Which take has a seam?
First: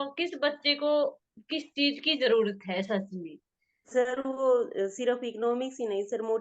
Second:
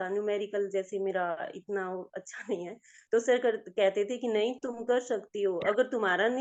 first; 1 cut; at 3.9 s

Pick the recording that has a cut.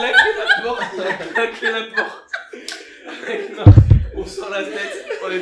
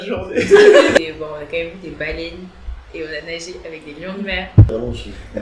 second; 2 cuts; at 1.0 s, 4.7 s

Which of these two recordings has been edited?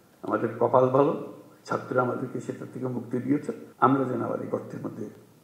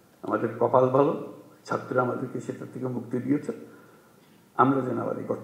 first; 1 cut; at 3.6 s

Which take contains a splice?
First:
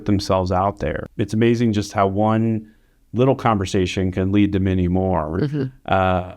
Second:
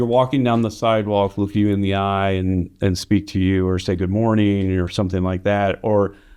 first; 1 cut; at 1.0 s

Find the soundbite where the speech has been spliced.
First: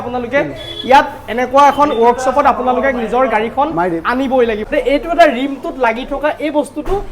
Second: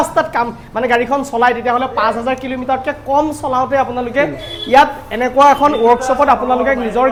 first; 1 cut; at 4.6 s

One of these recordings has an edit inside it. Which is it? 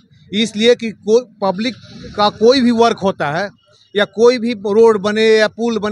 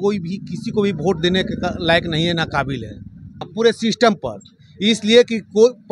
second; 1 cut; at 3.5 s

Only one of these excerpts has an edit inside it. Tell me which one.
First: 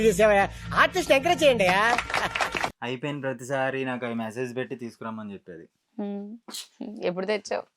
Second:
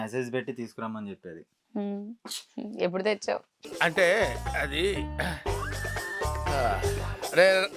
first; 1 cut; at 2.8 s

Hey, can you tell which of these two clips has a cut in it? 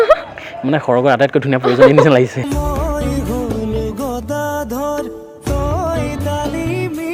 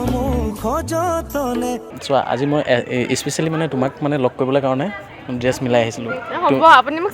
second; 1 cut; at 1.9 s

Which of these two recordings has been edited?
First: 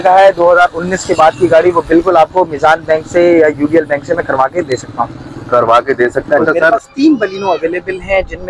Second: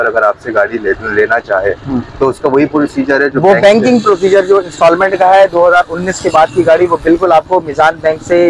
first; 1 cut; at 6.7 s

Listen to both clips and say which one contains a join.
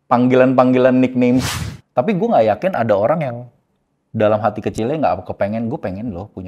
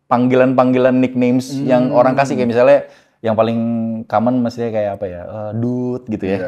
first; 1 cut; at 1.5 s

